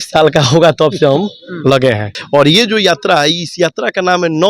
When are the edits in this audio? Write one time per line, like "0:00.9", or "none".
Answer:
0:02.1